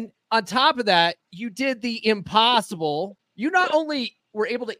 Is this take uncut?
no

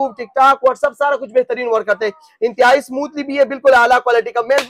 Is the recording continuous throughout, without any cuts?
yes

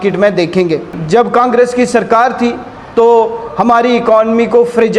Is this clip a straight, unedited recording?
no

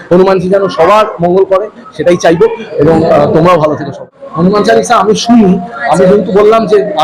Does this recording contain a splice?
yes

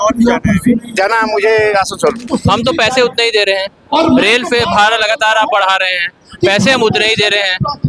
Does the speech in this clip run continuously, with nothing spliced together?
no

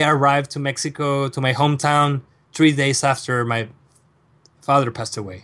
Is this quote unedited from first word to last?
yes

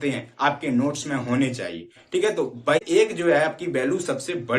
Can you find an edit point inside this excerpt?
yes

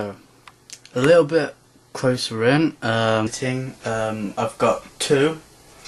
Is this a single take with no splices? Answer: yes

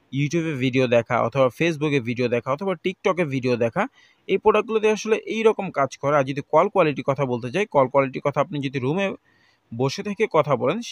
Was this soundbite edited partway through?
no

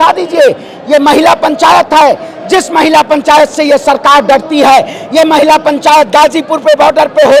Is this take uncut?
yes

